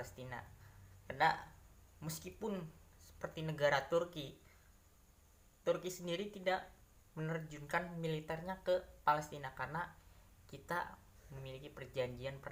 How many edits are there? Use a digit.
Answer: 0